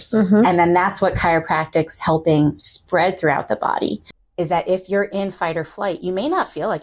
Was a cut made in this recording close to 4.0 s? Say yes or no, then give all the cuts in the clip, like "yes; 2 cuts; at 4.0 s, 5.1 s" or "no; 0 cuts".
yes; 1 cut; at 4.0 s